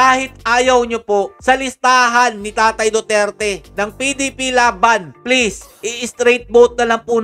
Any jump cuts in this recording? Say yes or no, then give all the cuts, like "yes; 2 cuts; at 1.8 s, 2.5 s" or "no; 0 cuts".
no; 0 cuts